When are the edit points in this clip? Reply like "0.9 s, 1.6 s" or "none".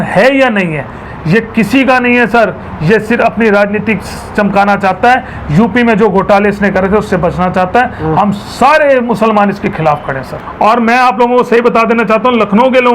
1.1 s, 10.4 s